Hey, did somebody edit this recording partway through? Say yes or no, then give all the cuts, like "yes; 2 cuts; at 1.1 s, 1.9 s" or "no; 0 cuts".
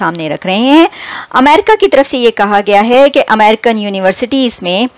no; 0 cuts